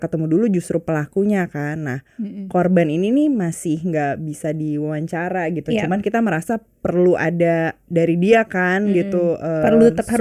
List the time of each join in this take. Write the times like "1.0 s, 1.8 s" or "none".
none

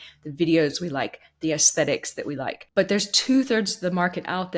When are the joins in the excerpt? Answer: 2.6 s

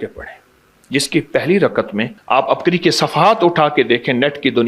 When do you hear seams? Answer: 2.2 s

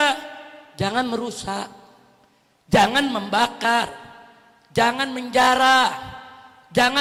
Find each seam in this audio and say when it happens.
none

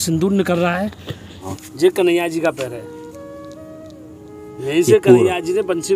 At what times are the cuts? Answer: 1.4 s

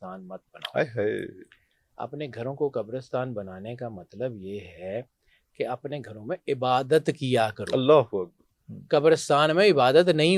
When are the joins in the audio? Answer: none

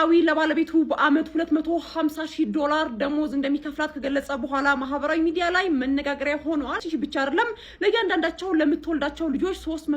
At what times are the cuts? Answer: 6.8 s

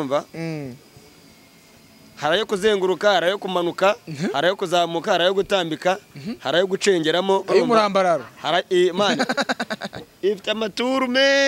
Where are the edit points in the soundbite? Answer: none

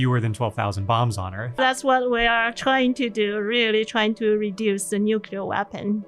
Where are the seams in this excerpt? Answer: 1.6 s

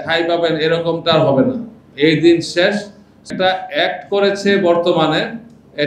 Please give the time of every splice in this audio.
3.3 s

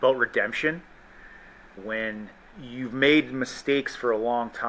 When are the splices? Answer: 1.7 s, 2.5 s

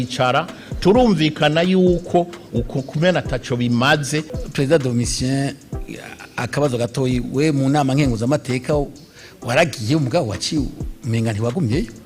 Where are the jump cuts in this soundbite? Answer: 4.4 s

